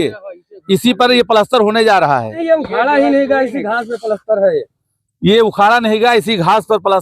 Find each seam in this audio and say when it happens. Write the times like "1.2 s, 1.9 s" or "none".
2.3 s